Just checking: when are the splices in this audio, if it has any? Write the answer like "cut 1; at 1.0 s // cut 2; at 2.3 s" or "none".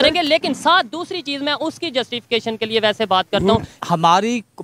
cut 1; at 3.7 s

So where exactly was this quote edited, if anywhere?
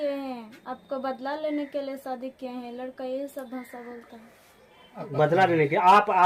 none

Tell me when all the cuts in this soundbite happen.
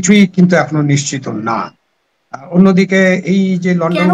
none

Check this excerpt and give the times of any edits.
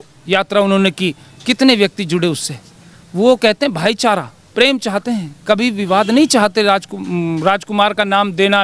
none

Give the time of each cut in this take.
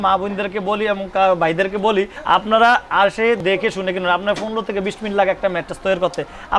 cut 1; at 2.2 s // cut 2; at 3.4 s

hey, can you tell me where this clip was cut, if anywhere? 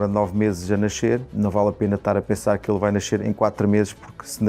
cut 1; at 1.3 s // cut 2; at 3.2 s

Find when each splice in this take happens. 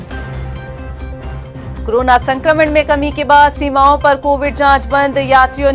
none

